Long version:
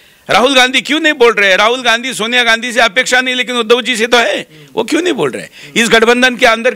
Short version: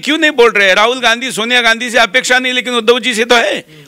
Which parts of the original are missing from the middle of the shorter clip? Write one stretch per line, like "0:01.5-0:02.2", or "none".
none

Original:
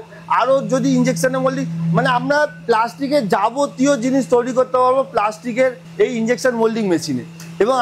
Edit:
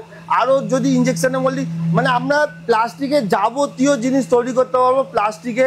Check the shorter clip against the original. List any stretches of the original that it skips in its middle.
none

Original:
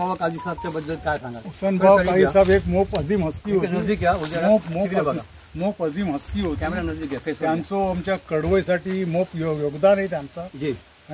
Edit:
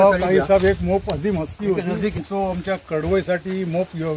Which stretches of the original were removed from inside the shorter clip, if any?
0:04.0-0:07.6

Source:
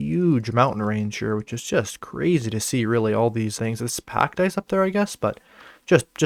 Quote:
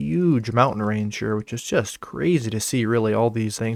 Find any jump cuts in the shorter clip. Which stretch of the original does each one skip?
none

